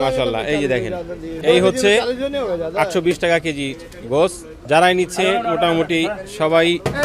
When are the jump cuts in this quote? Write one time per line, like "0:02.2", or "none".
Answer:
0:01.4
0:04.5